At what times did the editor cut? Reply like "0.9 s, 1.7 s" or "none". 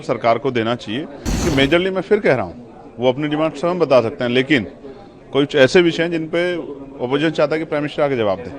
1.2 s